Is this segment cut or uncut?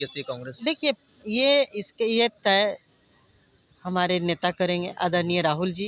uncut